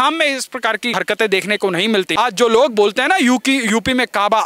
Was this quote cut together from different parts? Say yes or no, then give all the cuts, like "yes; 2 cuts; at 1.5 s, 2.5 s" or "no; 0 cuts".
yes; 2 cuts; at 1.0 s, 2.1 s